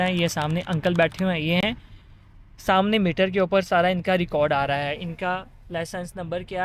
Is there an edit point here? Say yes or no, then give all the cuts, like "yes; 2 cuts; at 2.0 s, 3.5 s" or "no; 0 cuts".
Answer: no; 0 cuts